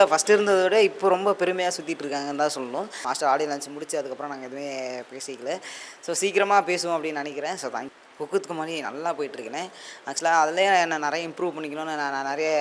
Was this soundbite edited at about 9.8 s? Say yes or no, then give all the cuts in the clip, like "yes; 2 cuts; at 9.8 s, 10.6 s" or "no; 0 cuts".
no; 2 cuts; at 3.0 s, 7.9 s